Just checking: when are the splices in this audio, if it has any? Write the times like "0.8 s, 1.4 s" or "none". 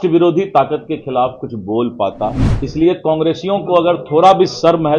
2.5 s